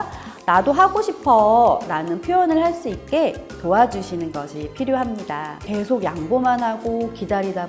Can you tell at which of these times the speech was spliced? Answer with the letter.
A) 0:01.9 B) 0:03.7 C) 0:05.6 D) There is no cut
C